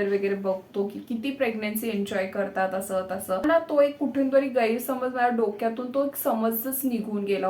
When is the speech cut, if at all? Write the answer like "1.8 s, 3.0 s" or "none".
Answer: 3.4 s